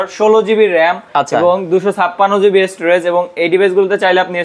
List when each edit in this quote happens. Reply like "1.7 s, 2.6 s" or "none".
none

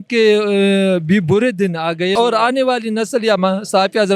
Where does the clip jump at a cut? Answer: 2.1 s

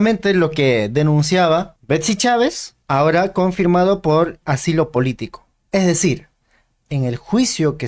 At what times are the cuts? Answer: 1.8 s, 2.7 s

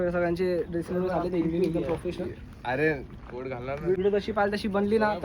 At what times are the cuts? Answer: 4.0 s

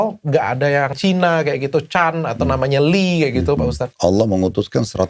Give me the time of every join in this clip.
1.0 s, 3.8 s

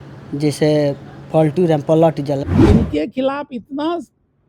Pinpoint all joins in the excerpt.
2.4 s

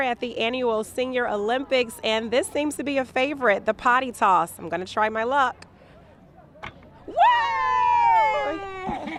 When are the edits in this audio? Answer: none

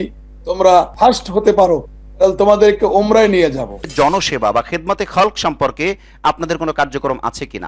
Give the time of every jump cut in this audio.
0.9 s, 3.8 s

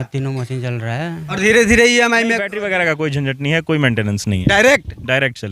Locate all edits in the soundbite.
2.5 s

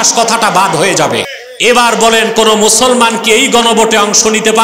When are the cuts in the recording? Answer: 1.4 s

